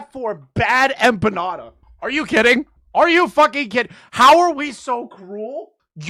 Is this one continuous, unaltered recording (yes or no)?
yes